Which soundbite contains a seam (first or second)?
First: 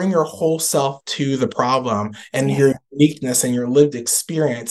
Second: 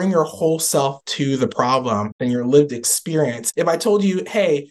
second